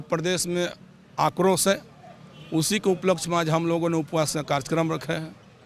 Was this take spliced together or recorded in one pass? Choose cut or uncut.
uncut